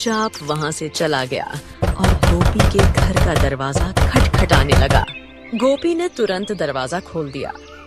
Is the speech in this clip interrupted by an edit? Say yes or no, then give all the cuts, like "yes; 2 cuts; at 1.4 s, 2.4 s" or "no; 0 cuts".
no; 0 cuts